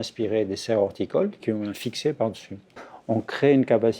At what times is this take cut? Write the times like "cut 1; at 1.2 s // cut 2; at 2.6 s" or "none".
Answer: cut 1; at 1.4 s // cut 2; at 2.7 s